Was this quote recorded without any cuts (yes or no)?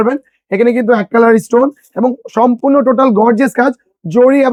yes